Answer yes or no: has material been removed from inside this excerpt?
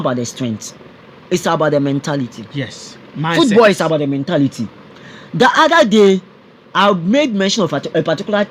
no